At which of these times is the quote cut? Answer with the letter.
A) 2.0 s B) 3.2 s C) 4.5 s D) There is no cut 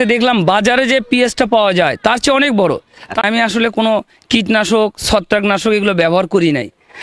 B